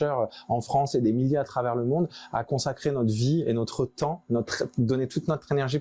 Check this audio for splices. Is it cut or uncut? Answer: uncut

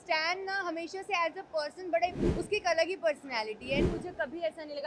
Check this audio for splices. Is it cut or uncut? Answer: cut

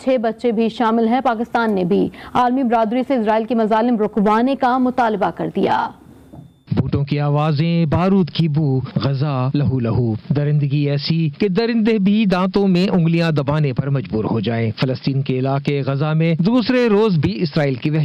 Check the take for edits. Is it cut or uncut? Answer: uncut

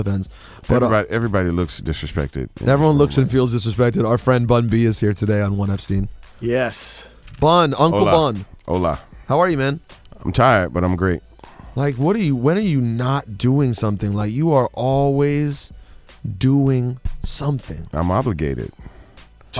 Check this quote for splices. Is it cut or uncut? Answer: cut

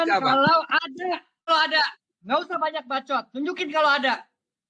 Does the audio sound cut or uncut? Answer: cut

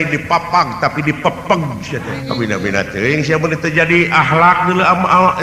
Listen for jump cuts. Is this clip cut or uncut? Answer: cut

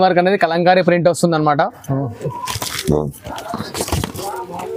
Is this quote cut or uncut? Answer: uncut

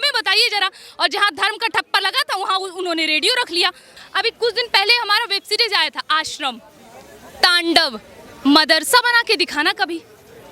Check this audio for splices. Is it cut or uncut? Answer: cut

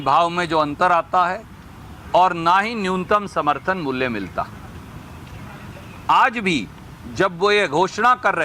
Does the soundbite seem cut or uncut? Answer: uncut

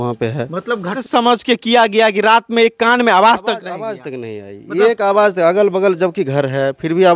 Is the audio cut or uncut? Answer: uncut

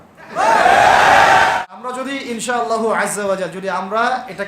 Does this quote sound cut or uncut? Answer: cut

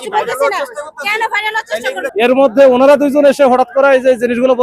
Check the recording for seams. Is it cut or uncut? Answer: cut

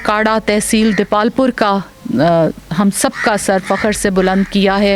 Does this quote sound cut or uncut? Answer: uncut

